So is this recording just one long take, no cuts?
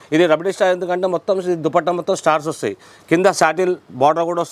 yes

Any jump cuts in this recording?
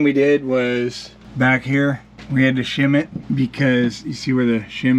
no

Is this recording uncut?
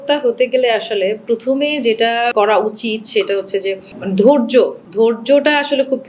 no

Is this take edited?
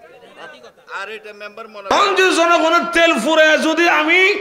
yes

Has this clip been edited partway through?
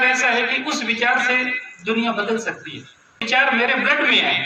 yes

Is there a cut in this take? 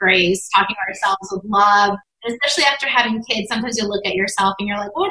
yes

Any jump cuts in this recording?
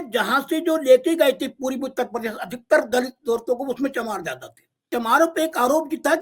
yes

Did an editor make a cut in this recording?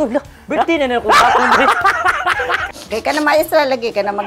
yes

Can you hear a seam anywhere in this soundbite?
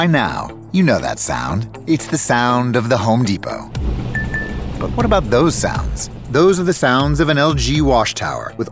no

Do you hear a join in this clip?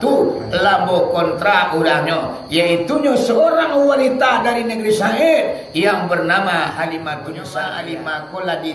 yes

